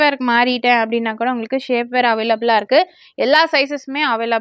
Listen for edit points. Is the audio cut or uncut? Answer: uncut